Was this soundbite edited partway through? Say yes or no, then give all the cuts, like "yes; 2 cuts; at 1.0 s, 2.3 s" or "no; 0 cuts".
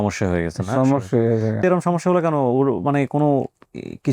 yes; 1 cut; at 1.6 s